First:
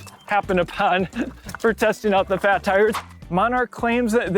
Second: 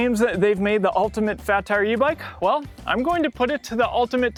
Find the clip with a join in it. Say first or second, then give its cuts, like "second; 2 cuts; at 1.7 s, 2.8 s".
first; 1 cut; at 3.0 s